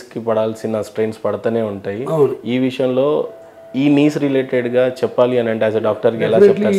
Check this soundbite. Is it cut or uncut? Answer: uncut